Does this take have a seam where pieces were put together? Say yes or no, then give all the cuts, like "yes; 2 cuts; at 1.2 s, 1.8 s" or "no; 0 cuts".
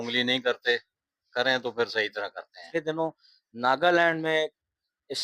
yes; 1 cut; at 2.6 s